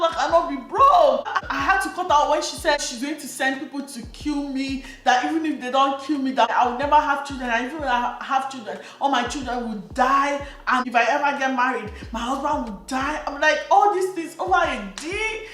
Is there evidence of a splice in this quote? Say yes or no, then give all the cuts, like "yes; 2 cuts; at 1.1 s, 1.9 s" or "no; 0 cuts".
yes; 4 cuts; at 1.4 s, 2.8 s, 6.5 s, 10.8 s